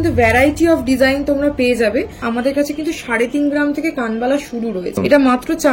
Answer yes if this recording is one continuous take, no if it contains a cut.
no